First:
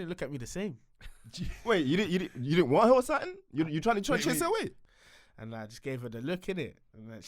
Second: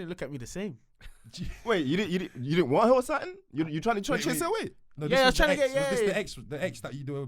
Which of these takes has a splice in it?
first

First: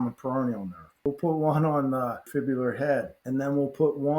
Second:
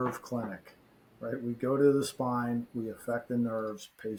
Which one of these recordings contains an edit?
first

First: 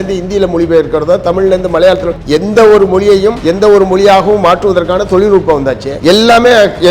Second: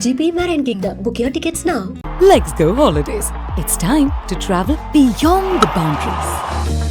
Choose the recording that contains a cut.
first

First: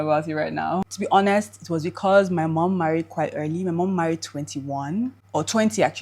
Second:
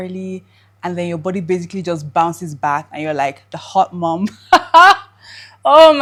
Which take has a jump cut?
first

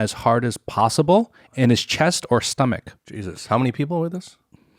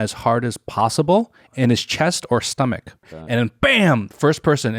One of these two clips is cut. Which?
second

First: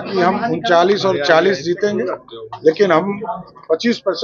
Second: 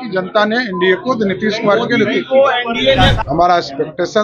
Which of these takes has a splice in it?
second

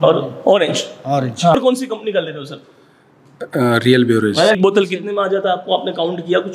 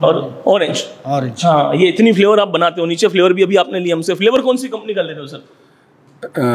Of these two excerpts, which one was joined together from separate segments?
first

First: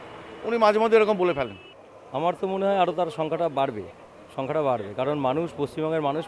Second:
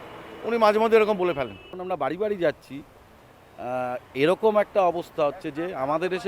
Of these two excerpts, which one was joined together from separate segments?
second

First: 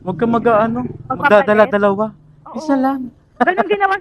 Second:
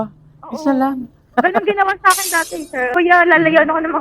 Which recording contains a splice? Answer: second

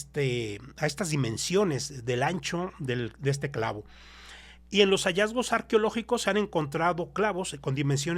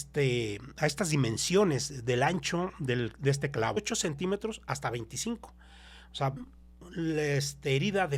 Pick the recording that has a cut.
second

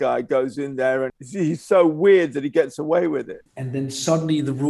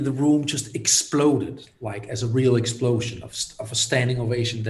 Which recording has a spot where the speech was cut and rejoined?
first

